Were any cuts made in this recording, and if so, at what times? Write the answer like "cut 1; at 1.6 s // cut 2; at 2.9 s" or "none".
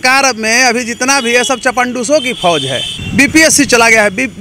cut 1; at 2.9 s